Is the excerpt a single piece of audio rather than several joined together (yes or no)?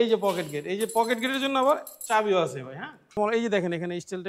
no